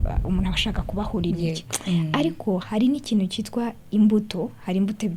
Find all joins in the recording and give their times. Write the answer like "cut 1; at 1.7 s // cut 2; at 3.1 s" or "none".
none